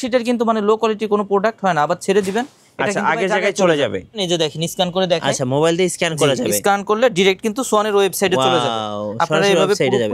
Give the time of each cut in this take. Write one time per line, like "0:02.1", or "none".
0:04.2